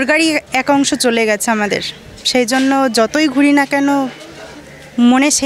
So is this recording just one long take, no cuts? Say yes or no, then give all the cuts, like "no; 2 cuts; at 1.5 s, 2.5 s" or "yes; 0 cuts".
yes; 0 cuts